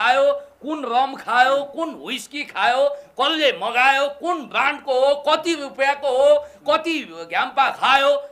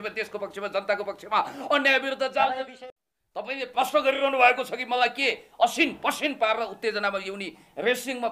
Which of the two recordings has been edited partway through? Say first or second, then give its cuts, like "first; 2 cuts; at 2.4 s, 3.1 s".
second; 1 cut; at 2.7 s